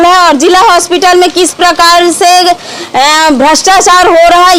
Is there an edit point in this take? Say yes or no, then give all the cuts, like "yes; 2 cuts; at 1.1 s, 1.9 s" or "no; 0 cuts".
no; 0 cuts